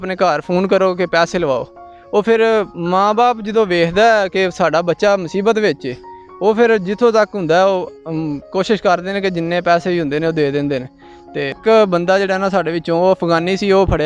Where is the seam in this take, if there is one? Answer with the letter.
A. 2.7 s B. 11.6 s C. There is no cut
B